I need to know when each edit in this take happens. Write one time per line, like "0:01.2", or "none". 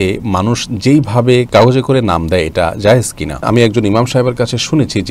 0:01.5
0:03.4